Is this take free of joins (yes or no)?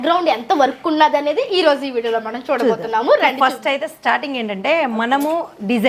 yes